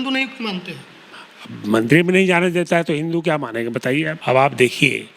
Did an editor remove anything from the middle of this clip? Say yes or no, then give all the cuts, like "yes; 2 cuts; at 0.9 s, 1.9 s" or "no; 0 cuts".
yes; 1 cut; at 4.2 s